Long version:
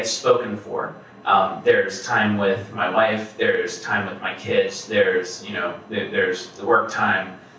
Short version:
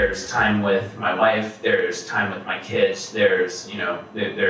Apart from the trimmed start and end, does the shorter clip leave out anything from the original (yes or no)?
no